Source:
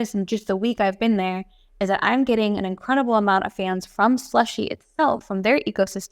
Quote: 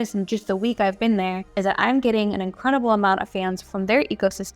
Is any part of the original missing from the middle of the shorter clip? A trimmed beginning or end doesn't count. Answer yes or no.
yes